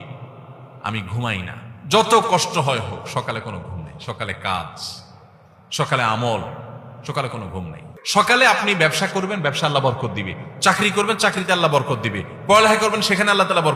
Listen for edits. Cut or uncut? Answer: cut